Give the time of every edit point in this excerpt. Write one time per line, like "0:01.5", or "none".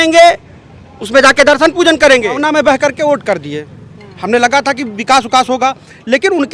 0:02.4